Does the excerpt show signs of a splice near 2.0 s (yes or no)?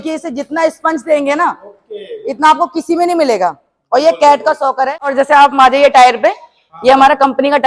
no